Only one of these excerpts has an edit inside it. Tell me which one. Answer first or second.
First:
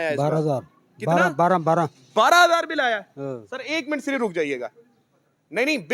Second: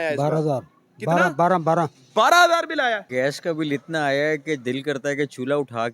second